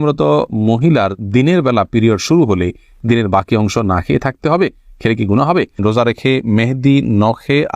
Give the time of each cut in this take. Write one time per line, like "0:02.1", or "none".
0:05.8